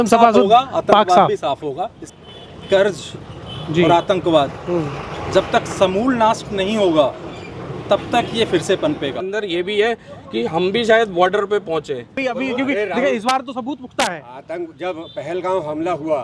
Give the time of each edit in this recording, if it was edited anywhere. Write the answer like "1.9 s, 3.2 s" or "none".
2.0 s, 9.2 s, 12.2 s